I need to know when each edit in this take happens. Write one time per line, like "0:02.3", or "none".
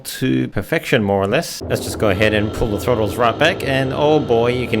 0:01.5